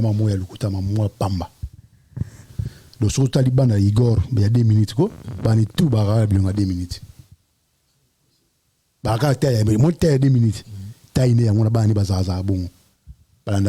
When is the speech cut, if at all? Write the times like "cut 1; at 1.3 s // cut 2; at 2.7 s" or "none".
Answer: none